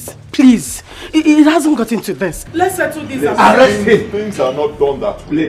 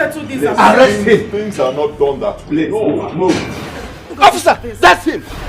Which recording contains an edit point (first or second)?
second